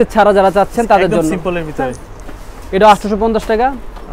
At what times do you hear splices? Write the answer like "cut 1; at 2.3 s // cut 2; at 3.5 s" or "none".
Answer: none